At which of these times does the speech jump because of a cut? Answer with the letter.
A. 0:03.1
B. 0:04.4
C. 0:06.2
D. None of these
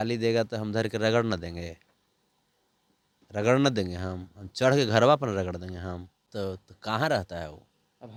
D